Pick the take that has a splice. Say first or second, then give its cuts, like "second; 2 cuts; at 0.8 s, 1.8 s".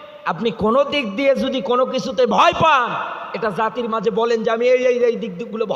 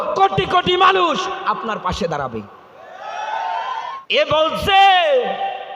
second; 1 cut; at 4.0 s